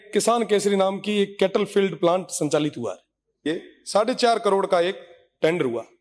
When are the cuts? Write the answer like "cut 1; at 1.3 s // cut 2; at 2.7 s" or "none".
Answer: cut 1; at 3.5 s